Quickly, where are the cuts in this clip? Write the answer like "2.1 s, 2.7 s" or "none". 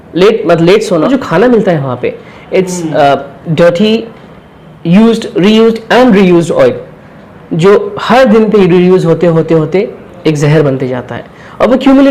1.1 s